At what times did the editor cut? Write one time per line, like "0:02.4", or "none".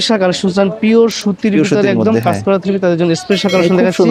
none